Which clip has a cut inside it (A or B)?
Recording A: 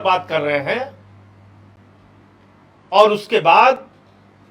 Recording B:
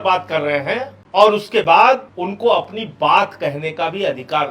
B